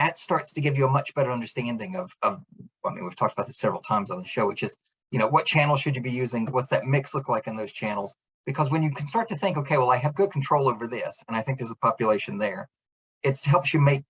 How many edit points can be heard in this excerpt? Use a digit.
0